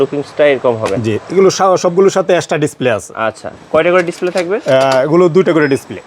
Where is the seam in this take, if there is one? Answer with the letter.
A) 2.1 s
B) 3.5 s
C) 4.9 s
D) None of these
D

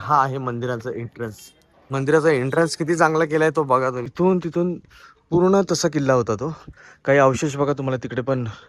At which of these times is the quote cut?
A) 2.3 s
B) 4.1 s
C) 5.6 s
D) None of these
B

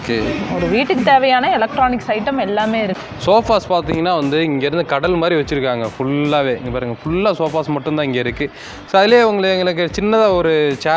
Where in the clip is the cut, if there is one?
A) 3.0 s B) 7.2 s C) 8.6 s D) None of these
A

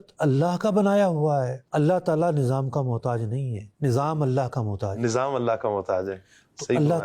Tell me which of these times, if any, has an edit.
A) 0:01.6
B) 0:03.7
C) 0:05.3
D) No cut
A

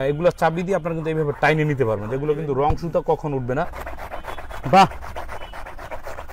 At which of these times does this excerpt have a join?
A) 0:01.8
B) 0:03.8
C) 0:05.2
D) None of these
B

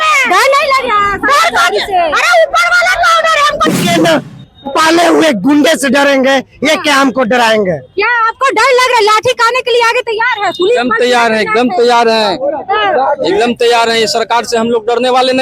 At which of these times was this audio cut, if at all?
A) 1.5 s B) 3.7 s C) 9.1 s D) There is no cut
B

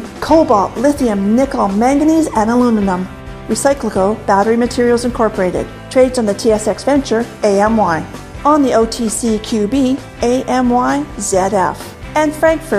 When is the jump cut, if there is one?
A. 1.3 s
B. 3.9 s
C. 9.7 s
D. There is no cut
D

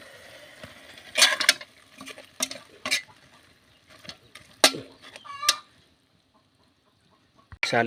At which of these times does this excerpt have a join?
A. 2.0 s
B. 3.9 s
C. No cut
C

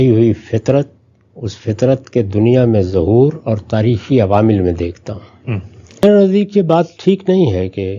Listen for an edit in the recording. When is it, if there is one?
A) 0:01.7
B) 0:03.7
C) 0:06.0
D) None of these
C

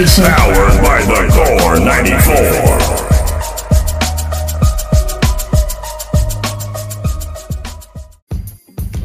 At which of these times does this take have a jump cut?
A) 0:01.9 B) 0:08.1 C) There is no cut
B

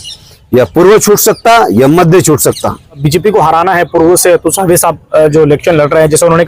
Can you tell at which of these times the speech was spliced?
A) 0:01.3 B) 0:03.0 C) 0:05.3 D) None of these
B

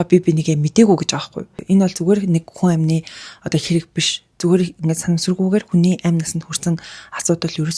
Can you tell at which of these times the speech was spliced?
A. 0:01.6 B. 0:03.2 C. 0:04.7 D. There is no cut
A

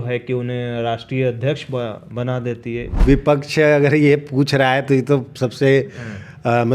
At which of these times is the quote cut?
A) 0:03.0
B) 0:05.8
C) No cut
A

